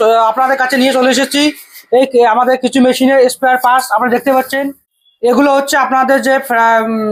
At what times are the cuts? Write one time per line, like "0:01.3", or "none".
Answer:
none